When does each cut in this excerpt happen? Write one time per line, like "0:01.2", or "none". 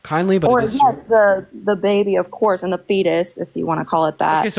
none

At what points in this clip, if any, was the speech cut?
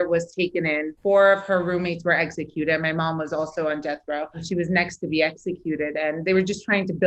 0:00.9
0:04.4

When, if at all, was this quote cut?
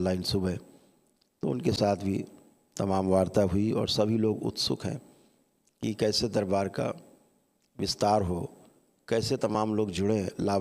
none

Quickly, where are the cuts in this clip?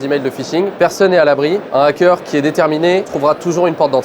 0:03.1

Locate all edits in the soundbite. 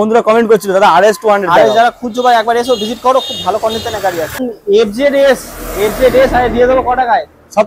0:04.5

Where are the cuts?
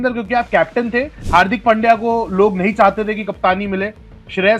0:01.2

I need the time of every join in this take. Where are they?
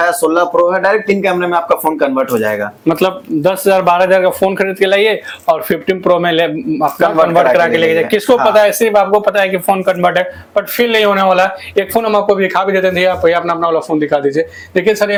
none

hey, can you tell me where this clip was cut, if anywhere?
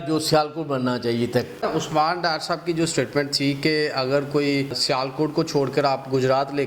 0:01.7
0:04.8

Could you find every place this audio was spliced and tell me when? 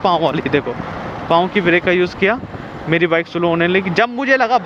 none

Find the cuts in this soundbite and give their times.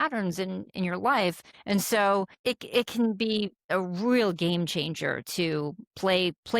0:01.5
0:02.3
0:03.6

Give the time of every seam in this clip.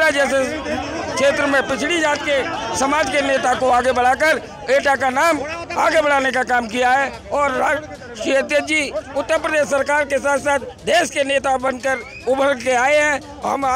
none

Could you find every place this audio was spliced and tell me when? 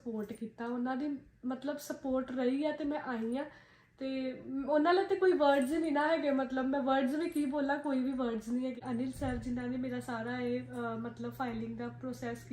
0:08.8

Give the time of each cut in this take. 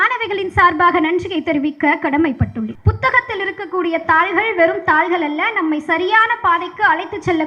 0:02.8

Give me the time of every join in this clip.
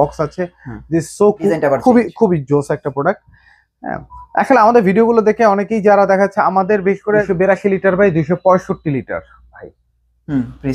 0:01.5
0:07.3

